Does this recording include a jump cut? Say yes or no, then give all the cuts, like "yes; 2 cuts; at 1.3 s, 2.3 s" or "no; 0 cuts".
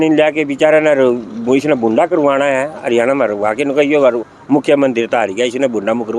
no; 0 cuts